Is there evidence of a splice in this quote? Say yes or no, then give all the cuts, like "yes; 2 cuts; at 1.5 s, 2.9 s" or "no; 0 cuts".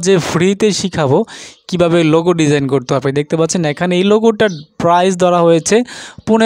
no; 0 cuts